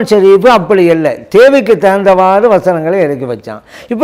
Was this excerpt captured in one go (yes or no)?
yes